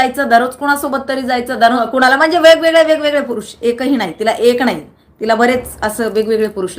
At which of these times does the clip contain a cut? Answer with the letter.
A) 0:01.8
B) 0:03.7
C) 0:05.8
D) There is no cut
A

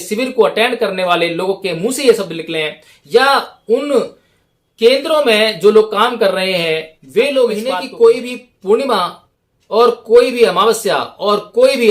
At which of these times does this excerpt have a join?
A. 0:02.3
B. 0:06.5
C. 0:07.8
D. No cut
C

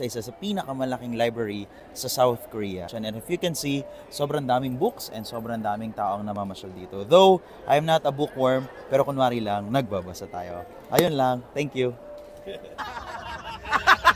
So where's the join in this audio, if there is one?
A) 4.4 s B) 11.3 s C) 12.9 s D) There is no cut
C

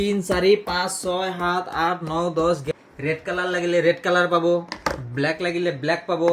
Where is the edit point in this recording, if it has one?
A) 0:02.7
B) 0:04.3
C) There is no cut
A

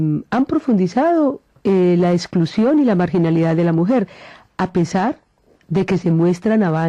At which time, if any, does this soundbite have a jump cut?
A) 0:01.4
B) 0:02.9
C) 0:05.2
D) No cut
D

